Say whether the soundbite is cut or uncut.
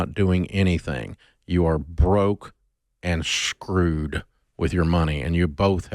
uncut